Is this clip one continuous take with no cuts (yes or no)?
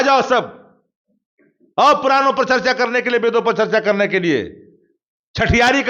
yes